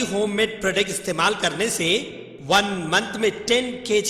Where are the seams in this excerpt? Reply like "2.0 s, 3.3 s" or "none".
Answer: none